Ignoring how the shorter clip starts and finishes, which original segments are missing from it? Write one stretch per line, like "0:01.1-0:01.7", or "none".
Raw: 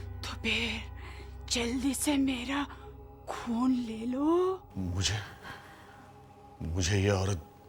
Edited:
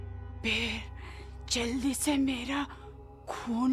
none

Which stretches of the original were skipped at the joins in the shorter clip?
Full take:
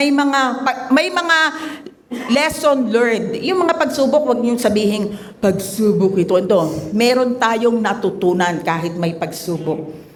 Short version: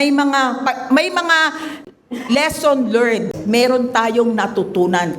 0:03.3-0:06.8

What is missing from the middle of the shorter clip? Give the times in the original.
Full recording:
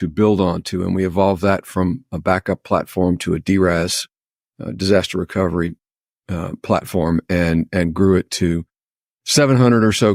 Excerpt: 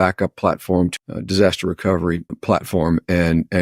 0:03.2-0:04.4
0:05.8-0:06.5

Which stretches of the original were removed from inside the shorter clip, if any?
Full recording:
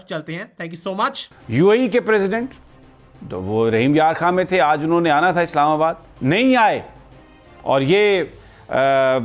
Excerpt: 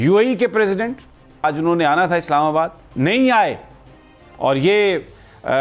0:03.0-0:04.7

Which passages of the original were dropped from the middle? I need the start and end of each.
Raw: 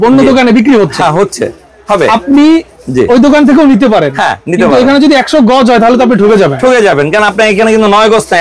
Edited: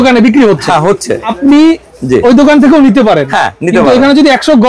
0:01.6-0:02.2

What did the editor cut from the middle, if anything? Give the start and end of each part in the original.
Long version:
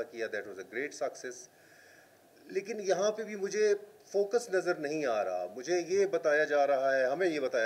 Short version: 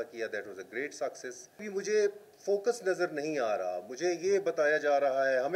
0:01.6-0:03.3

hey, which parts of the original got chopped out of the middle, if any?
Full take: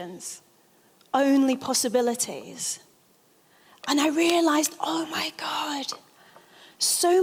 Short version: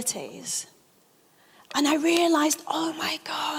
none

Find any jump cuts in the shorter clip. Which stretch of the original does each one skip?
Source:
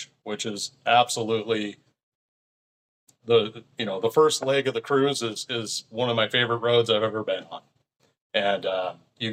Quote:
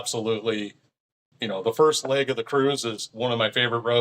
0:02.3-0:03.7
0:05.4-0:05.8

